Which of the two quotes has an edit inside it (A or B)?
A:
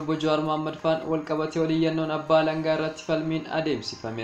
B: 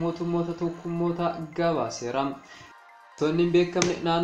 B